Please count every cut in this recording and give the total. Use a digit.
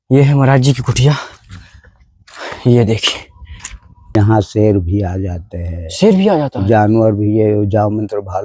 1